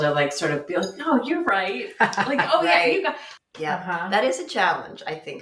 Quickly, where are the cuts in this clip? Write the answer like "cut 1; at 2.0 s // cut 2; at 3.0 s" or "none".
cut 1; at 3.3 s